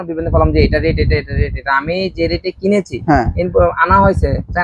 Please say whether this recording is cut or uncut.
uncut